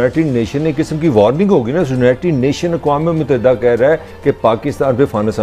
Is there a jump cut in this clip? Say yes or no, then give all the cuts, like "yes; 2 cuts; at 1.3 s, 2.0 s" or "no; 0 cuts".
no; 0 cuts